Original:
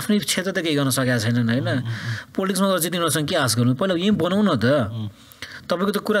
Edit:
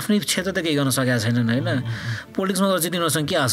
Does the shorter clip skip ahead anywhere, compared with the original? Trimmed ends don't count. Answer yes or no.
no